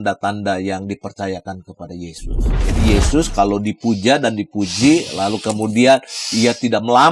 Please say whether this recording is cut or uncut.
cut